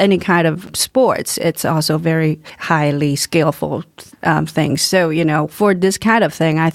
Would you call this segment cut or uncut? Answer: uncut